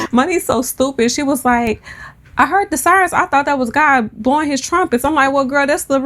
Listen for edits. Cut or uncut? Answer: uncut